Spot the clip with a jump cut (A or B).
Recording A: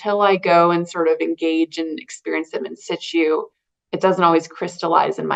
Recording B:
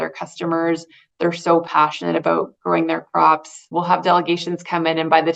B